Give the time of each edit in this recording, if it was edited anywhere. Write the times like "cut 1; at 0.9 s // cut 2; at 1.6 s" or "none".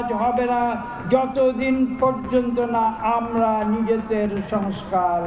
none